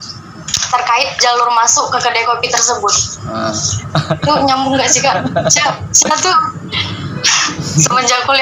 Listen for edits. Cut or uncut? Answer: uncut